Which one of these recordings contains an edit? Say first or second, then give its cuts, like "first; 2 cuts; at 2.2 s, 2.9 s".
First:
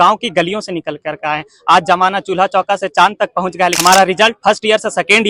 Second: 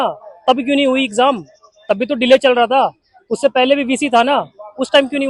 first; 1 cut; at 3.8 s